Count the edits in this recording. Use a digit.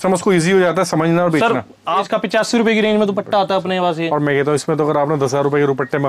1